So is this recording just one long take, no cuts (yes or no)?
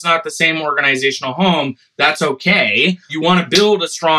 no